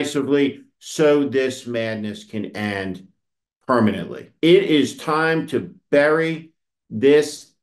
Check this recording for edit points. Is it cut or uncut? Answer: cut